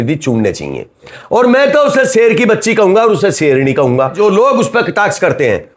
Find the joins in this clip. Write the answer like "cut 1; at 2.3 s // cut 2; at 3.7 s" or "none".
cut 1; at 1.2 s // cut 2; at 4.2 s